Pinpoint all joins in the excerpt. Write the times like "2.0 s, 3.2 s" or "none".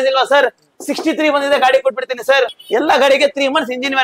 2.5 s